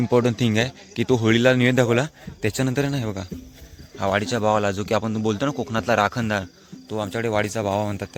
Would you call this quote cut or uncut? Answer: uncut